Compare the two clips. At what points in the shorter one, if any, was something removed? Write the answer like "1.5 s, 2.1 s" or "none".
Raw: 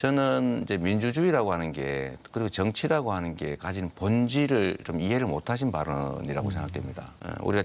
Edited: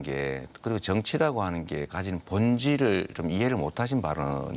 none

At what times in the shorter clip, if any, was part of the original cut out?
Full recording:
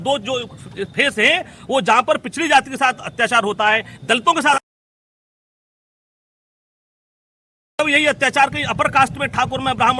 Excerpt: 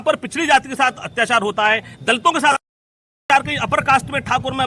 3.2 s

